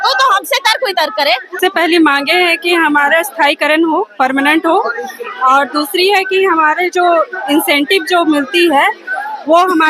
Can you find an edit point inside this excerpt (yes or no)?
yes